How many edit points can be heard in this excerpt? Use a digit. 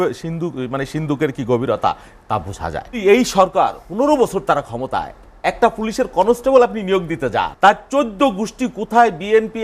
2